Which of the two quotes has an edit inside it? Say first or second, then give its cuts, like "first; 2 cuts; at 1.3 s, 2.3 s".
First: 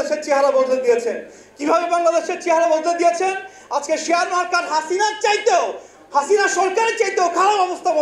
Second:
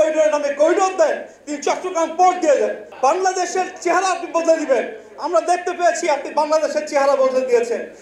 second; 1 cut; at 2.8 s